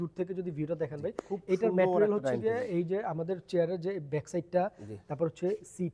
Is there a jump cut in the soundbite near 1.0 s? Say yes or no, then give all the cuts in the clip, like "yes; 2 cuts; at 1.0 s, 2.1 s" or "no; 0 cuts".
no; 0 cuts